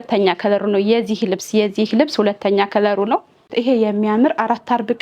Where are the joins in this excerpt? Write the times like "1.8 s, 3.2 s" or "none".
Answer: 3.5 s